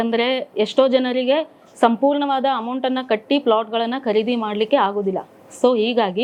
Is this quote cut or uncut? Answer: uncut